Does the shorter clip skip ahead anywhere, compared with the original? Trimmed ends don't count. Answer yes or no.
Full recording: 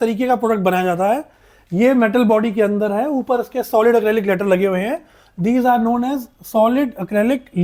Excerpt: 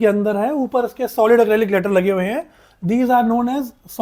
no